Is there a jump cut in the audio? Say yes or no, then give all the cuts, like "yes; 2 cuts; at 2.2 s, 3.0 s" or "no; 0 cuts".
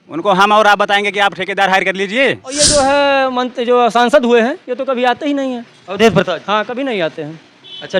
yes; 1 cut; at 2.5 s